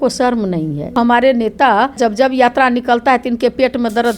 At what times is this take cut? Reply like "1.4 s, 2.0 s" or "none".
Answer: 1.0 s, 2.0 s